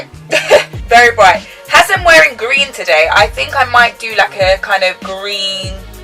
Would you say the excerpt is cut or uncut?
uncut